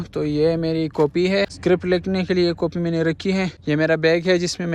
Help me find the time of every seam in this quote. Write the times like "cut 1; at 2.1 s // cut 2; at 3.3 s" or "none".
cut 1; at 1.5 s